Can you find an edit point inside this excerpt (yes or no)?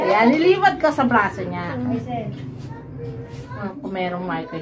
yes